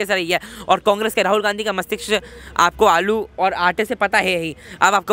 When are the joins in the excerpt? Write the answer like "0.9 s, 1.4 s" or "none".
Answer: none